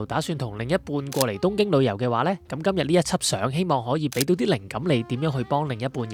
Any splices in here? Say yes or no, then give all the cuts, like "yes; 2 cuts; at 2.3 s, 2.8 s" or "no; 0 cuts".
no; 0 cuts